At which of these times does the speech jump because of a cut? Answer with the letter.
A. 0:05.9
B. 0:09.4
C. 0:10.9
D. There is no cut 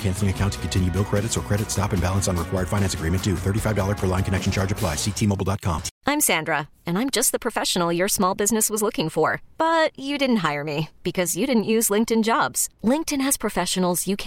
A